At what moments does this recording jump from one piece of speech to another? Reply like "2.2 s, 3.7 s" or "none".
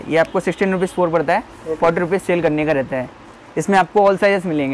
none